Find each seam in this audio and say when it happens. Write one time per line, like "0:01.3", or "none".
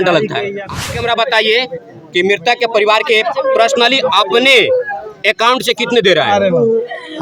0:00.9